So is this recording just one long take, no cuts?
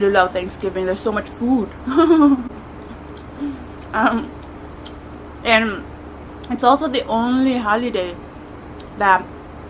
yes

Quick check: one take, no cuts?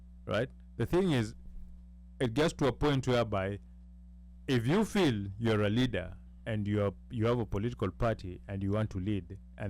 yes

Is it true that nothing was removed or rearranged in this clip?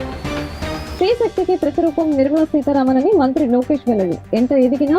no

